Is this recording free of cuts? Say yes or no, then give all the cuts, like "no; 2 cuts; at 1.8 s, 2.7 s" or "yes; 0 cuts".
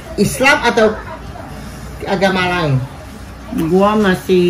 yes; 0 cuts